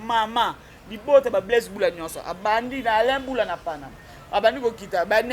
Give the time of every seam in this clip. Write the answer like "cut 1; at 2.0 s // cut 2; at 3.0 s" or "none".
none